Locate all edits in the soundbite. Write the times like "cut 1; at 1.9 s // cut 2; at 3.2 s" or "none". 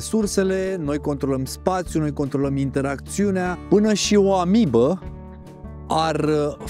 cut 1; at 3.6 s